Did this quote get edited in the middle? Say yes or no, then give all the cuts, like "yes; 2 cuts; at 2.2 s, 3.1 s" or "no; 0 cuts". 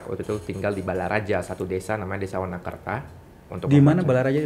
yes; 1 cut; at 3.2 s